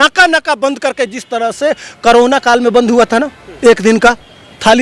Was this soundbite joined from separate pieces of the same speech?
no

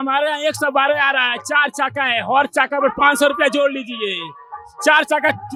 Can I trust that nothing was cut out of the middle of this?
yes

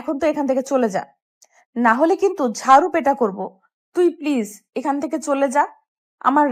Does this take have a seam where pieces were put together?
no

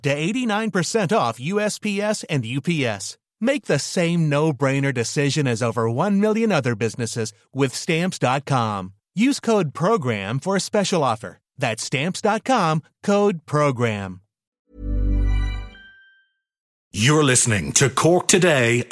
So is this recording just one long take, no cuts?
no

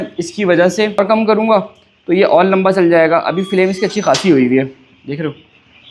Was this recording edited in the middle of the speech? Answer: yes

